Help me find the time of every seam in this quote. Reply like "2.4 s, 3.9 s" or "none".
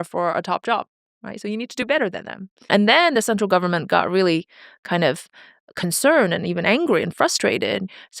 2.6 s